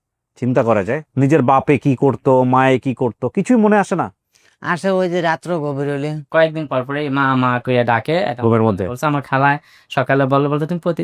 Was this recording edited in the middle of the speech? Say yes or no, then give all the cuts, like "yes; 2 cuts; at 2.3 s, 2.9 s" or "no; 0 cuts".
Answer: yes; 2 cuts; at 1.0 s, 6.2 s